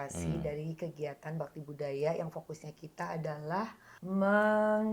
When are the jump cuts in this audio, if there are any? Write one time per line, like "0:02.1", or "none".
0:03.9